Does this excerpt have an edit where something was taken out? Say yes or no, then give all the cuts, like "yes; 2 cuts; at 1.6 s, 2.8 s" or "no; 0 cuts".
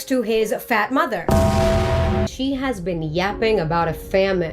yes; 1 cut; at 2.3 s